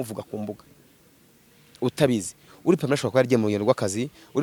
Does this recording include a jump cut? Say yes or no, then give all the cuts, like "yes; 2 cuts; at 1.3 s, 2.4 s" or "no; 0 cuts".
no; 0 cuts